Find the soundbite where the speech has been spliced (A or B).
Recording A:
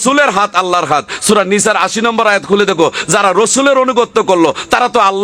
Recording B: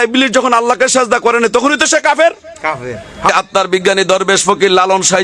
B